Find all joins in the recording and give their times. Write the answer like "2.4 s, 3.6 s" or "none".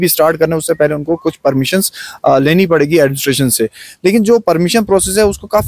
none